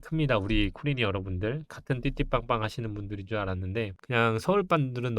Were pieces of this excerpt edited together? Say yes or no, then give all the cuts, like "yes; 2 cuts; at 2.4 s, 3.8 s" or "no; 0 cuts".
yes; 1 cut; at 4.0 s